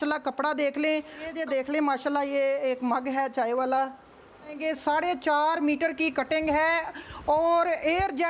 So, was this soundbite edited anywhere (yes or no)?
yes